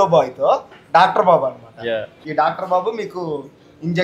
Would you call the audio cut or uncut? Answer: cut